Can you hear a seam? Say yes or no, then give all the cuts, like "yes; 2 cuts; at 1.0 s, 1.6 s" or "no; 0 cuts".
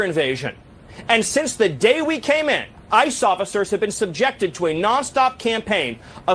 yes; 1 cut; at 2.7 s